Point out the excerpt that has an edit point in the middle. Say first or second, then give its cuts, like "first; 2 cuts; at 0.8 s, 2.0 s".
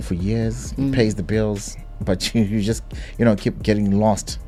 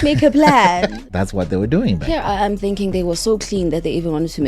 second; 1 cut; at 1.0 s